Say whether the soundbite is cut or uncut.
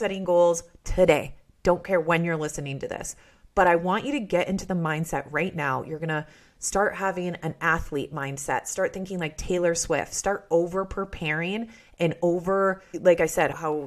uncut